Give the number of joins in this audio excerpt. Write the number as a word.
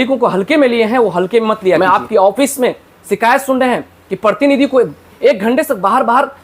one